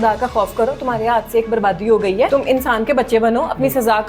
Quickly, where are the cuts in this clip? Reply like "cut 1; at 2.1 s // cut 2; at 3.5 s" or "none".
cut 1; at 2.3 s

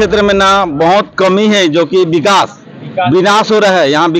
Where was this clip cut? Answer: none

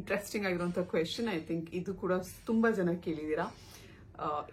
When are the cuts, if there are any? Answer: none

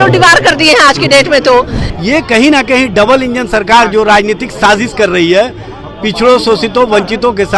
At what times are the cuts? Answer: cut 1; at 1.8 s

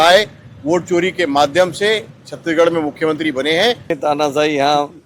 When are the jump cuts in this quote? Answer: cut 1; at 4.0 s

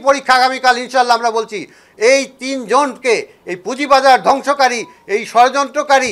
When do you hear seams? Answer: none

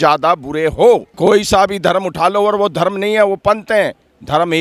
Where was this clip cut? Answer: cut 1; at 1.1 s

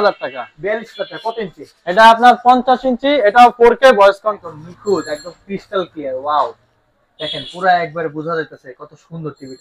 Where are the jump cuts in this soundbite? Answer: cut 1; at 4.4 s

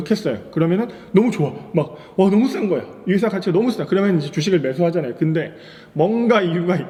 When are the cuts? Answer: none

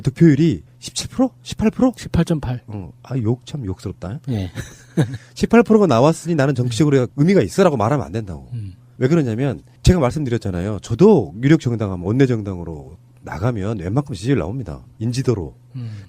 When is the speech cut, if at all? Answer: cut 1; at 3.0 s

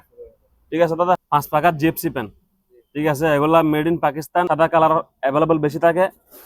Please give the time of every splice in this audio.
cut 1; at 1.2 s // cut 2; at 4.5 s

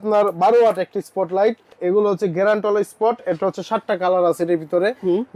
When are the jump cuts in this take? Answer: cut 1; at 1.8 s

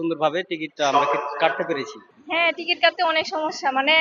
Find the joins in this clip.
cut 1; at 2.0 s

